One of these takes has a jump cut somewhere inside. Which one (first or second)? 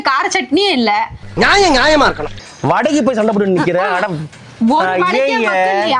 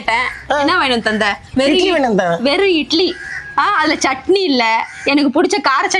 first